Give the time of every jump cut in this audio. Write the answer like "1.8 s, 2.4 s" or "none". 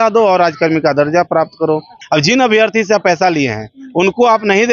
2.0 s